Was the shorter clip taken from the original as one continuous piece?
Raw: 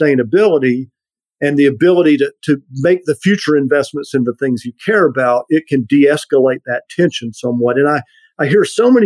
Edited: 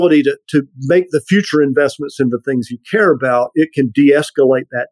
yes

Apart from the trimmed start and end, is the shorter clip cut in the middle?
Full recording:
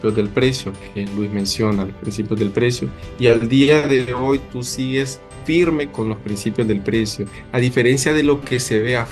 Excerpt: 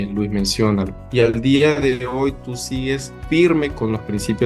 yes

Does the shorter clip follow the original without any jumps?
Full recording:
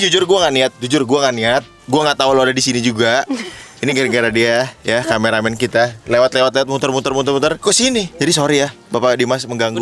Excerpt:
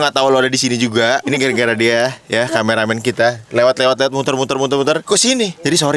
no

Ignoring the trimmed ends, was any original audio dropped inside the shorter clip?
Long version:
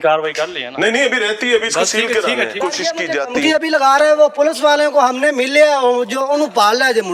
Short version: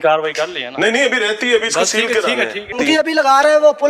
yes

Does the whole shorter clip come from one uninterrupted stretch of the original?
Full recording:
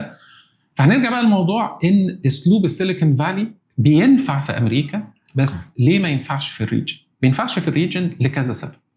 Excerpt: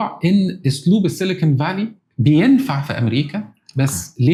yes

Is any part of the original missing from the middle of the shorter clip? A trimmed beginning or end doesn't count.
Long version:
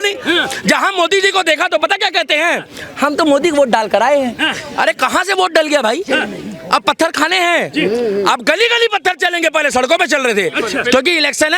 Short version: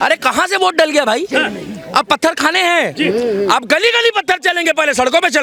no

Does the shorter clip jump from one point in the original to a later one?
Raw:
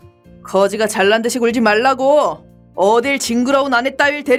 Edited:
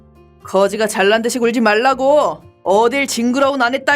yes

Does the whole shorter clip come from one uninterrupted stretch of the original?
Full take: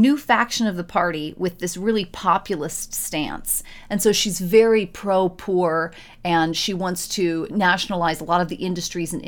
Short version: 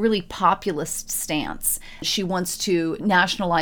no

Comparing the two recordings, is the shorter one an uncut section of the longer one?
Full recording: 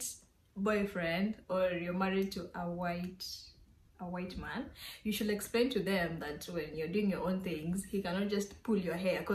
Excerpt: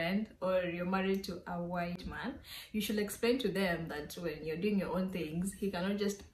no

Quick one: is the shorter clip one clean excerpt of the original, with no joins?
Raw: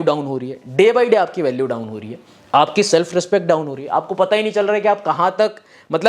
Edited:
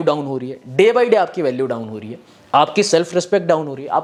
yes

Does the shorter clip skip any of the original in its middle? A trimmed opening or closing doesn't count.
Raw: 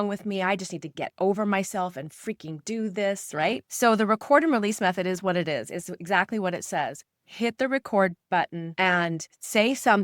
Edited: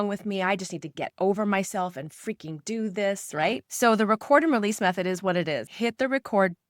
yes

